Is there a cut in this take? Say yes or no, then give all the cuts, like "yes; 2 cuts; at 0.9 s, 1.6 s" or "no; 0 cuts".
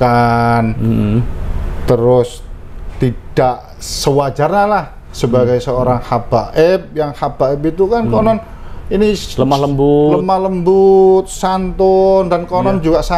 no; 0 cuts